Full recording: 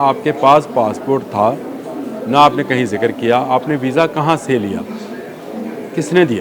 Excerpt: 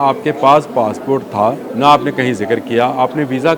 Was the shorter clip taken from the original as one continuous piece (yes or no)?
no